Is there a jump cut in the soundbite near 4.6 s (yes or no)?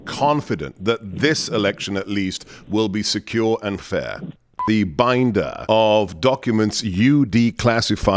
yes